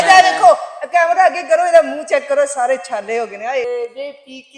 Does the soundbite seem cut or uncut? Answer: cut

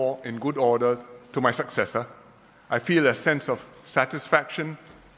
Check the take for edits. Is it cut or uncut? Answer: uncut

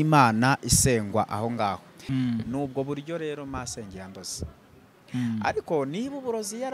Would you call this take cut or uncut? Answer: cut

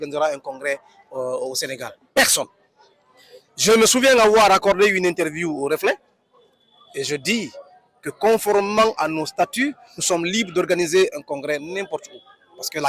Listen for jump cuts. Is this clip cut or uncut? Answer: uncut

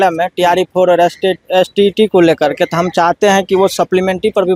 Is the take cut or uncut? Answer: uncut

